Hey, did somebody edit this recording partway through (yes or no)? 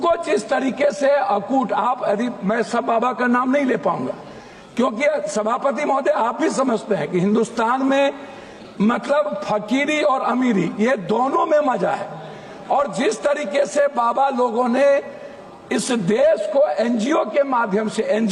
no